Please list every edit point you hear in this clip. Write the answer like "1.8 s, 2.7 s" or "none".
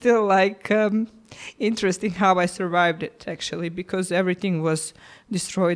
none